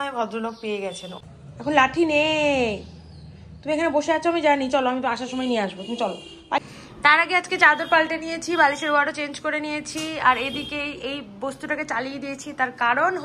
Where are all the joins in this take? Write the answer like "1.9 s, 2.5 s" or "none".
1.1 s, 6.6 s